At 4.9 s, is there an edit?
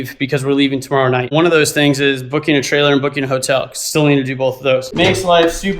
yes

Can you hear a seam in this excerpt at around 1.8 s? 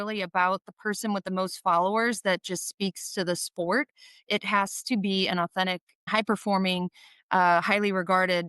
no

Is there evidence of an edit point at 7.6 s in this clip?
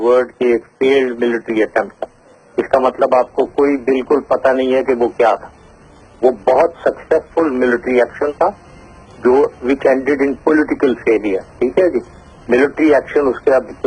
no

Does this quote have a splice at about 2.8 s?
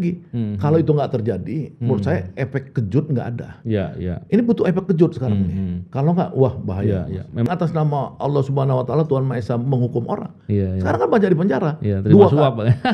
no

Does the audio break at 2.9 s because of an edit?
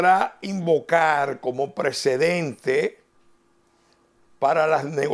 no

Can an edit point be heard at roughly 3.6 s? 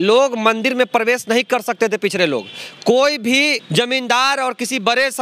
yes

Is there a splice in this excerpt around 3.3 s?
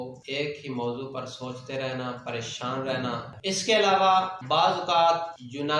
yes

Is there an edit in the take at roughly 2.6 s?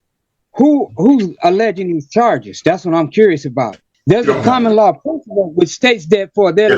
no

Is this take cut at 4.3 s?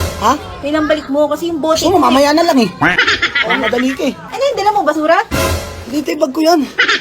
yes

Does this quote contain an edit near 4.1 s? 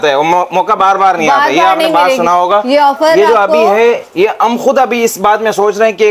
no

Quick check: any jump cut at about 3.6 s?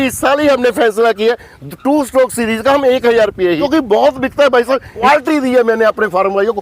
yes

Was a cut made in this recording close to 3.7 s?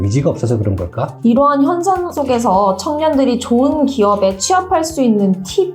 no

